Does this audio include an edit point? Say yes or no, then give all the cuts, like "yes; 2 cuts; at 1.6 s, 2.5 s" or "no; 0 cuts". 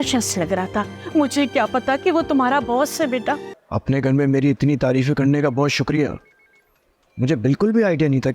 yes; 1 cut; at 3.6 s